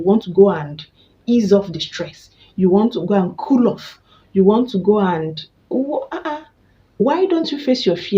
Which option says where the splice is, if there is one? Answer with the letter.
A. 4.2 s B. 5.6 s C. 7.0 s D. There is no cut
C